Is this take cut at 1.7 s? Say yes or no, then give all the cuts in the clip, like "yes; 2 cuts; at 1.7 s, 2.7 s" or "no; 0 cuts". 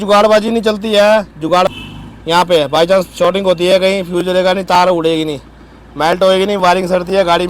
yes; 1 cut; at 1.7 s